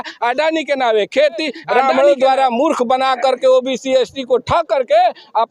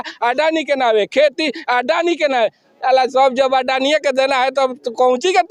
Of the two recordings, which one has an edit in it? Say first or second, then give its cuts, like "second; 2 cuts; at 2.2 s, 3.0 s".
first; 1 cut; at 1.6 s